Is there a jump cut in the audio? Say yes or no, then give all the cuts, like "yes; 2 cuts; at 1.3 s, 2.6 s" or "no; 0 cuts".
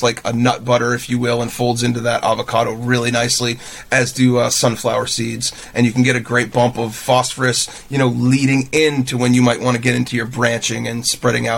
no; 0 cuts